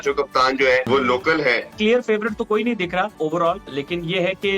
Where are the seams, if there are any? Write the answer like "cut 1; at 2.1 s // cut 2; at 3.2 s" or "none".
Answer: cut 1; at 0.9 s // cut 2; at 1.8 s // cut 3; at 3.5 s